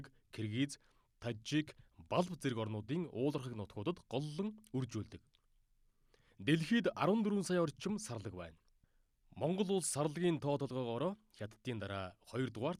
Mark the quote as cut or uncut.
uncut